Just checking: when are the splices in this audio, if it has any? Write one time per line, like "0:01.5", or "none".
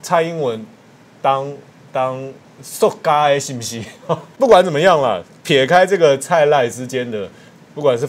0:04.3